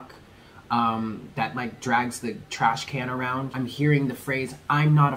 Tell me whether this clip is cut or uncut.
cut